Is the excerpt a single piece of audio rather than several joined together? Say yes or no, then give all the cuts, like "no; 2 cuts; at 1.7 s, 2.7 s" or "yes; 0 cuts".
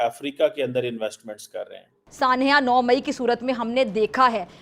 no; 1 cut; at 2.0 s